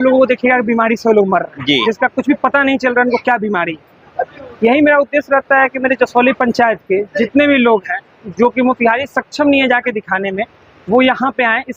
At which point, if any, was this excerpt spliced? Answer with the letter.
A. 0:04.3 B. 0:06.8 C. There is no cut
C